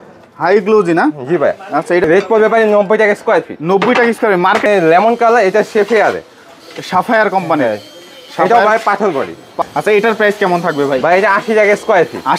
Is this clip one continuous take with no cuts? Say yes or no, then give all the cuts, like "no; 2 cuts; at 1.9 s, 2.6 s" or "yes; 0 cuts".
no; 3 cuts; at 2.0 s, 4.7 s, 9.6 s